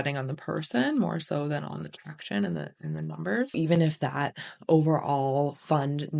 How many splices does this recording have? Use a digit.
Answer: 1